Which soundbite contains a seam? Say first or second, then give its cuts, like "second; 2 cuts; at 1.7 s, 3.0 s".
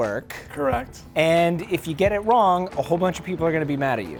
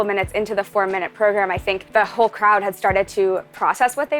second; 1 cut; at 1.8 s